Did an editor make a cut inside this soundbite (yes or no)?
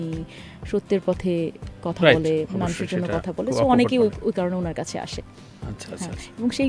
no